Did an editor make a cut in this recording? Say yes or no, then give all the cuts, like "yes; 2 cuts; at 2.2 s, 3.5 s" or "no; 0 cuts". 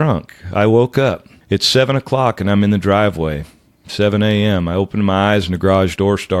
yes; 1 cut; at 1.3 s